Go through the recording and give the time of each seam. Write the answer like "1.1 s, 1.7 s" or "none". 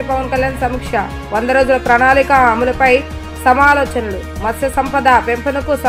none

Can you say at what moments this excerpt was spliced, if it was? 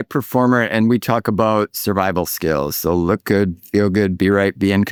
none

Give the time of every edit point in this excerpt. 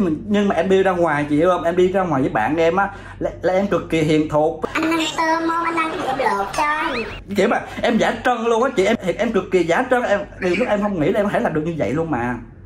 4.6 s

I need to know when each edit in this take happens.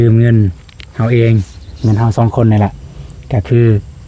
none

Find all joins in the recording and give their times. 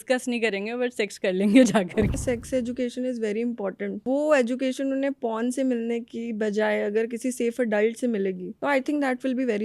2.2 s, 4.0 s, 8.5 s

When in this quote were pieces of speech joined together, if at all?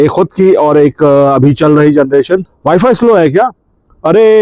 2.4 s

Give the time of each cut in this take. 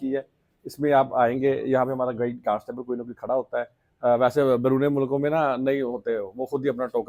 none

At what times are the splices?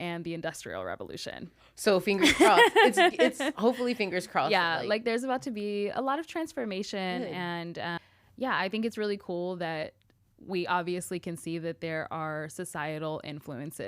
8.0 s

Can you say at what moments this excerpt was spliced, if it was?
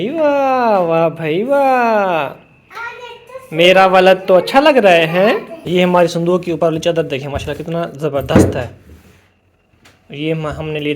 5.5 s

